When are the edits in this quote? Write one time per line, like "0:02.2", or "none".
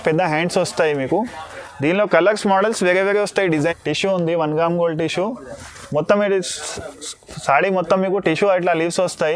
0:03.5